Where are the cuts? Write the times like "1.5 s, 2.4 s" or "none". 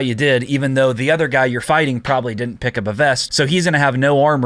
3.3 s